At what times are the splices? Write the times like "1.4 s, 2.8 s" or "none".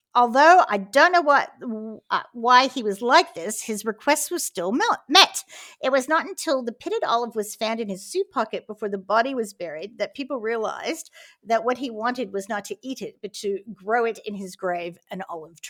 none